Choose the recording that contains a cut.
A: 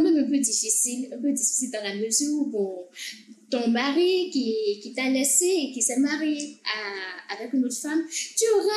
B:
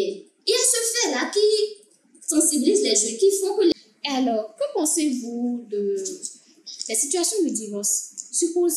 B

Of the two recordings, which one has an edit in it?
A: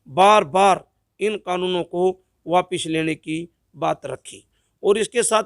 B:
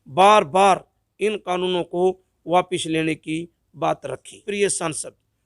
B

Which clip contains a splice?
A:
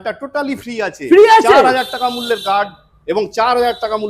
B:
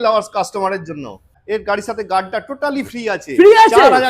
B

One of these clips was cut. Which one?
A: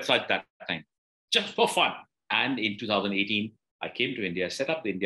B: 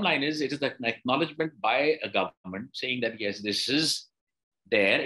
A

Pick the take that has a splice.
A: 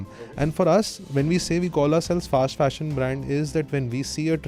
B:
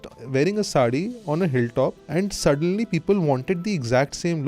B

